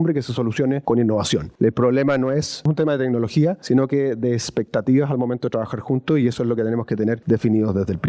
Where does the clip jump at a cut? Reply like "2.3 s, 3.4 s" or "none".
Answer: 0.8 s, 1.5 s, 2.7 s, 3.6 s, 7.2 s